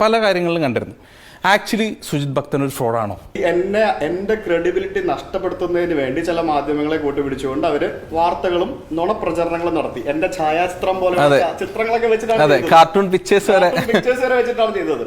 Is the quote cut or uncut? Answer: cut